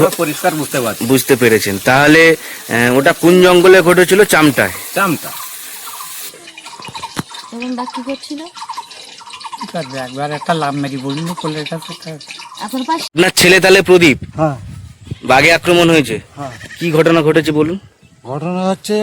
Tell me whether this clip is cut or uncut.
cut